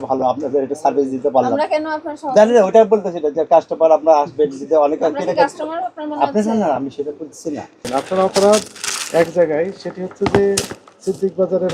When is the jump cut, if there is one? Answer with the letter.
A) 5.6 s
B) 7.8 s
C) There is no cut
B